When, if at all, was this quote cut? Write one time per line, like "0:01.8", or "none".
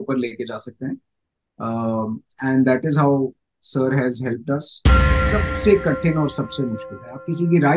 0:05.0